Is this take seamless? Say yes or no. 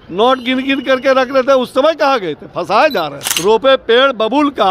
no